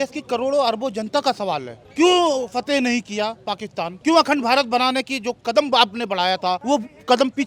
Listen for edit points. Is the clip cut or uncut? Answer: cut